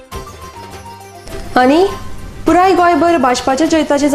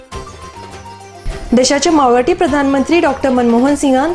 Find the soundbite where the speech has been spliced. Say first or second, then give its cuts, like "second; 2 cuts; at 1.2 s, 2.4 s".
first; 1 cut; at 1.2 s